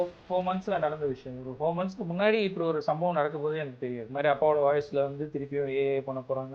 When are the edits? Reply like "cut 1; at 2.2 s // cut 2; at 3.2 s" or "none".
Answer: cut 1; at 4.1 s